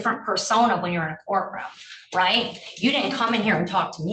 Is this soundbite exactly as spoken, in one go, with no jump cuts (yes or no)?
yes